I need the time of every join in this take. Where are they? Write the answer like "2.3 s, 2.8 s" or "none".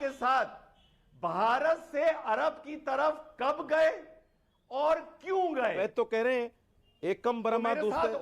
5.8 s